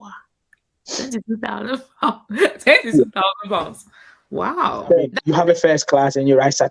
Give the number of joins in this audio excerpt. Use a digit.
1